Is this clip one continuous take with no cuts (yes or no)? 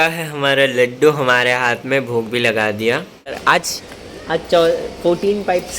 no